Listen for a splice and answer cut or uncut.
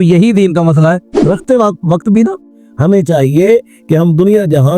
cut